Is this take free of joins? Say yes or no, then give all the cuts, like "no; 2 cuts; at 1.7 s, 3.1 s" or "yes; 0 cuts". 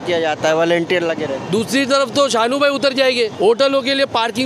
no; 1 cut; at 3.3 s